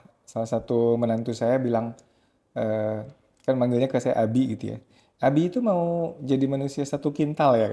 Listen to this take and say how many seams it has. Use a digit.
0